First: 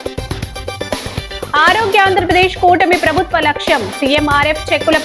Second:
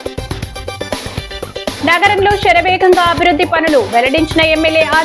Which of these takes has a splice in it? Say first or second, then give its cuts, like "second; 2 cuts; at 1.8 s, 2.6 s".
second; 1 cut; at 1.5 s